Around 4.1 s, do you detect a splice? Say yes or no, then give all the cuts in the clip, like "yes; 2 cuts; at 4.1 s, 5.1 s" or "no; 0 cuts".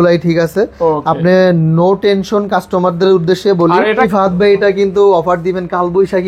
yes; 1 cut; at 4.1 s